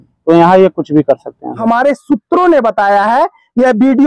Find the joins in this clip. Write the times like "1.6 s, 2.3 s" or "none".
1.5 s